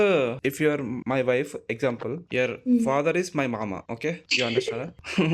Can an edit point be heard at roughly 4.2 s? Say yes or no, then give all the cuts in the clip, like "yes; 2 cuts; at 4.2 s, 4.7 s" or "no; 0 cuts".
no; 1 cut; at 2.3 s